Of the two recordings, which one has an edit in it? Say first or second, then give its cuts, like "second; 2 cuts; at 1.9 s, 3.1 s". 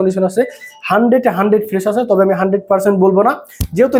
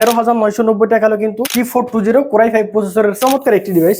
second; 2 cuts; at 1.4 s, 3.2 s